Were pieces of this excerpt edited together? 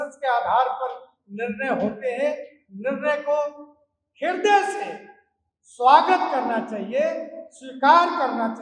no; 0 cuts

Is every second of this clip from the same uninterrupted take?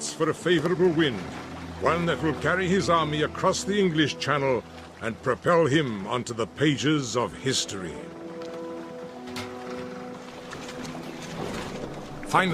yes; 0 cuts

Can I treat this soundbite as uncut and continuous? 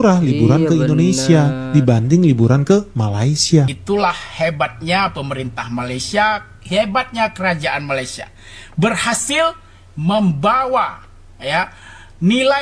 no; 1 cut; at 3.8 s

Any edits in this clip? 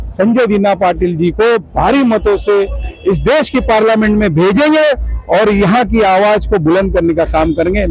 no; 0 cuts

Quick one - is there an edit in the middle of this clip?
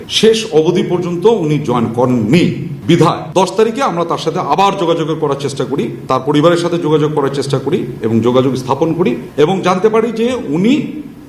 no; 0 cuts

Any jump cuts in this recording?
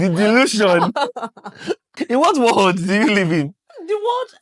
yes; 1 cut; at 1.8 s

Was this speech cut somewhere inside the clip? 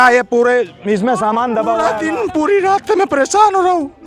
yes; 1 cut; at 2.0 s

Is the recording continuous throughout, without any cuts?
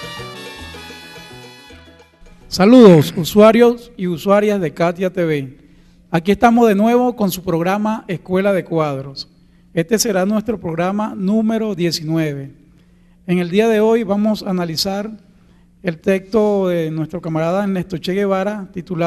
yes; 0 cuts

